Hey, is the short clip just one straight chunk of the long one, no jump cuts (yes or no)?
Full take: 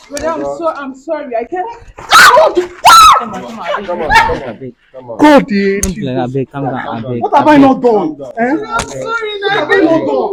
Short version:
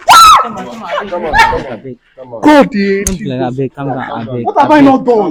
yes